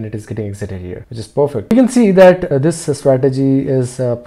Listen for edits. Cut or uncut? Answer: cut